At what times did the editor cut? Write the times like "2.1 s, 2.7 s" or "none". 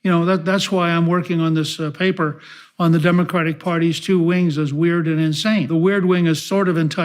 5.7 s

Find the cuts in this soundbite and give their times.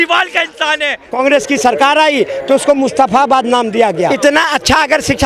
1.2 s, 4.1 s

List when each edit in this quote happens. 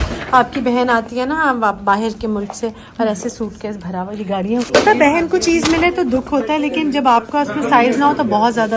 4.7 s

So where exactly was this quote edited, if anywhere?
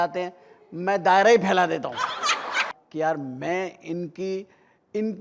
2.7 s

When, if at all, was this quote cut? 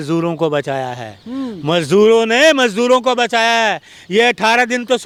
none

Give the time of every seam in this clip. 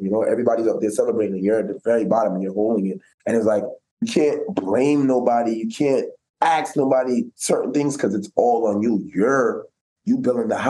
3.1 s

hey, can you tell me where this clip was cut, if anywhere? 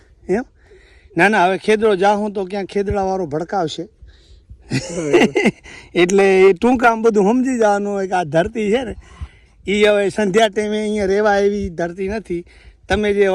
none

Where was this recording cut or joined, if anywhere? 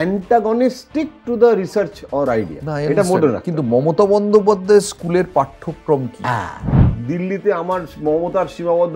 6.7 s

